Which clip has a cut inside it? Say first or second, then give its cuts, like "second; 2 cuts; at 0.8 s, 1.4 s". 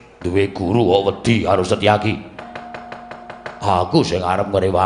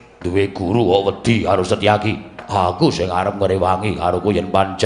second; 1 cut; at 2.3 s